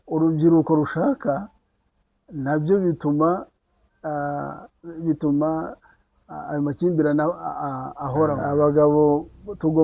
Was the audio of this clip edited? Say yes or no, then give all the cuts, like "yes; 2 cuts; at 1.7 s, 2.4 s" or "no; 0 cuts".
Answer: yes; 1 cut; at 8.4 s